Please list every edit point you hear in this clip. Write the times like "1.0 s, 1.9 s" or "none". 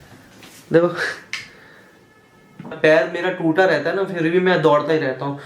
2.8 s